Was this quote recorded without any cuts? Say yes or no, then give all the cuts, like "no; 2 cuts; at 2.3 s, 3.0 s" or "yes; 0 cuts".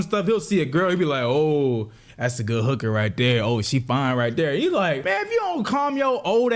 no; 1 cut; at 5.0 s